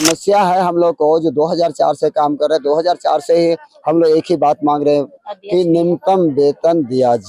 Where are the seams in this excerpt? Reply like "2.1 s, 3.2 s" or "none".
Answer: none